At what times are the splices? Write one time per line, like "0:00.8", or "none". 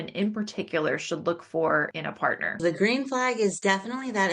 0:02.5
0:03.6